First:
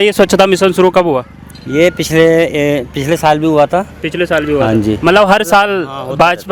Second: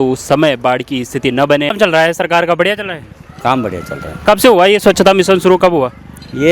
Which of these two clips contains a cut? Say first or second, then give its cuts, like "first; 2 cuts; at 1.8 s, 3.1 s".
second; 1 cut; at 1.7 s